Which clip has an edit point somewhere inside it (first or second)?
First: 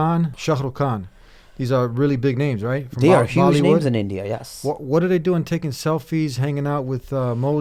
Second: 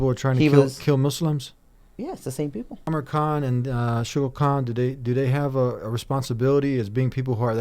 second